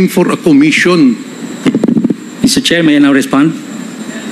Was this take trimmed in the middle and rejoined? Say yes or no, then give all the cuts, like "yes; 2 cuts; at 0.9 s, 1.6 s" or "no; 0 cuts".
no; 0 cuts